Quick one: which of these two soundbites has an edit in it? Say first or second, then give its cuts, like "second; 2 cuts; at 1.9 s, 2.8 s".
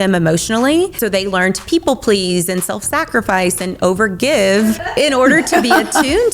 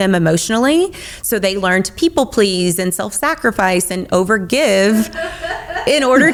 first; 2 cuts; at 0.9 s, 4.8 s